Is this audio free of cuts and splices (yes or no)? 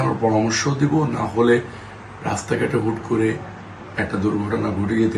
yes